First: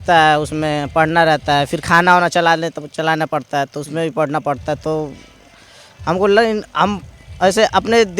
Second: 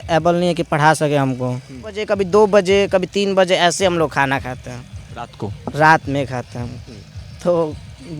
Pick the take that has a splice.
second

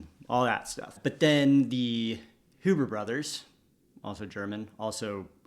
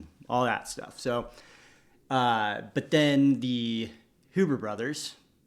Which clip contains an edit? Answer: first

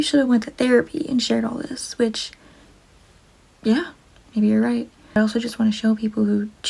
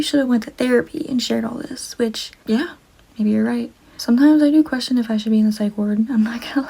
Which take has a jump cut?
second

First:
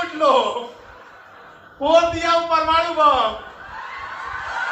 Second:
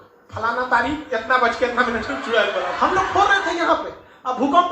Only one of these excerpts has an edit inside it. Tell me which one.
second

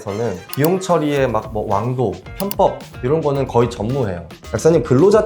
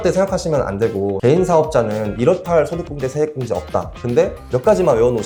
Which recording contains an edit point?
first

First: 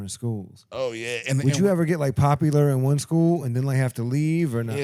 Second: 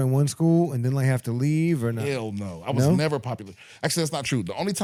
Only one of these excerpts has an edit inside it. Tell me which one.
first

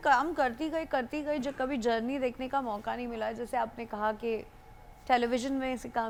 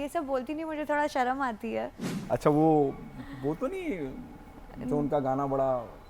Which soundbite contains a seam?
second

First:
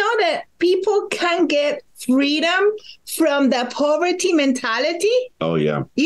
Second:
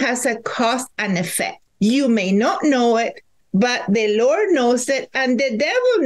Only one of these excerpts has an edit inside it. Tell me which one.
second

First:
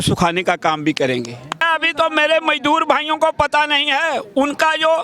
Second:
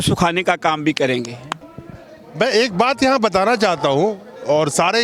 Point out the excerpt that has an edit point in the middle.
first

